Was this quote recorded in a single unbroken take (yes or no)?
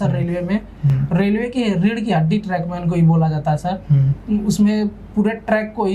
yes